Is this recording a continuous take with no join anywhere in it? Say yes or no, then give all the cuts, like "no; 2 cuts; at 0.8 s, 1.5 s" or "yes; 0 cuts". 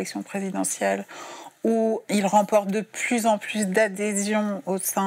no; 1 cut; at 2.0 s